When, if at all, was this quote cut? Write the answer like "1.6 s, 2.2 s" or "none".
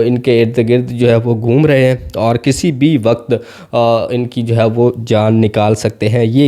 none

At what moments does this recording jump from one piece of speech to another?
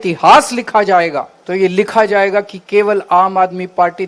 1.3 s

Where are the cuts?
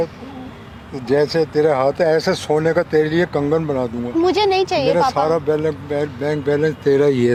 none

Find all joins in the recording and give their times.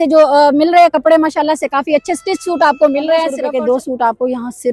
3.4 s

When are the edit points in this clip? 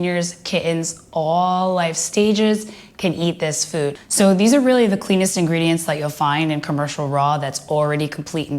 4.0 s

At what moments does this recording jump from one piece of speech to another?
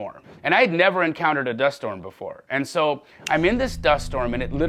none

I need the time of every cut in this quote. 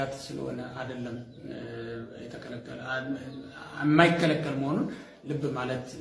none

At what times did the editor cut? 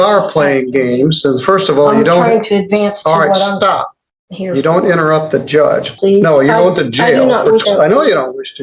5.9 s, 7.6 s

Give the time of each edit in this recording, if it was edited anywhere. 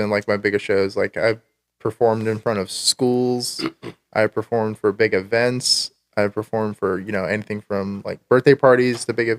none

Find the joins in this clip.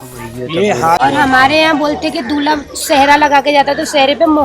1.0 s

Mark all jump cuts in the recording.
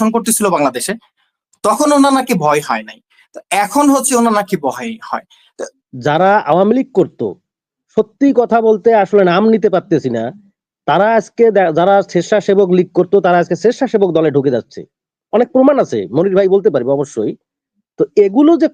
5.6 s

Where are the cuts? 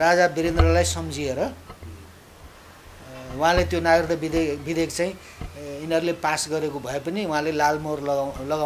none

